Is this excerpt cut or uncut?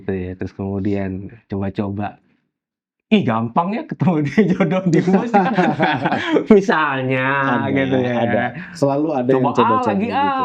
uncut